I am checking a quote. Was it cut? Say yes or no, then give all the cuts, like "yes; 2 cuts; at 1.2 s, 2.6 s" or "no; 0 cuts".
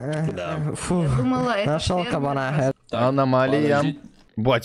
yes; 1 cut; at 2.7 s